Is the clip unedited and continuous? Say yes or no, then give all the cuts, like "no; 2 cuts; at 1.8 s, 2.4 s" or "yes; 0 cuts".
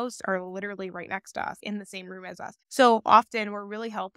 yes; 0 cuts